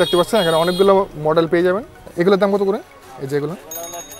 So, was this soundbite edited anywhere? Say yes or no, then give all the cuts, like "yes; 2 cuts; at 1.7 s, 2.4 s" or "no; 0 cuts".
yes; 1 cut; at 2.0 s